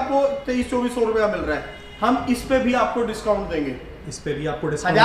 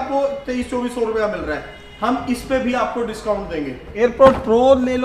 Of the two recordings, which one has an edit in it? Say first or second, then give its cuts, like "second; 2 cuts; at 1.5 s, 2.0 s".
second; 1 cut; at 4.0 s